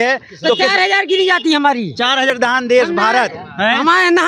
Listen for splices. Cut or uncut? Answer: cut